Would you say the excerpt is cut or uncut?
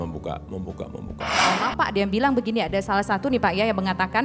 cut